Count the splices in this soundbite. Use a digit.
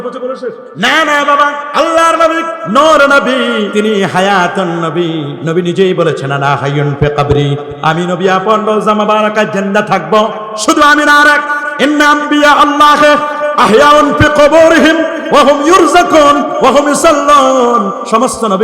4